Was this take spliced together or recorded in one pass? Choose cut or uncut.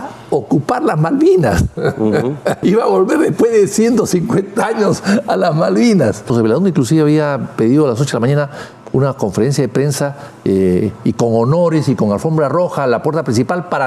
cut